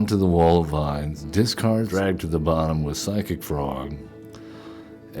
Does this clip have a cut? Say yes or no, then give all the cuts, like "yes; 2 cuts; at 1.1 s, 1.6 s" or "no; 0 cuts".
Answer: yes; 2 cuts; at 1.2 s, 1.9 s